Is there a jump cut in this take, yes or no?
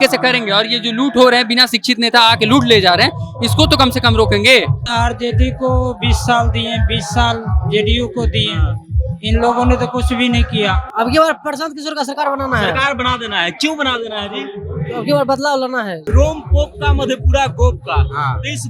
yes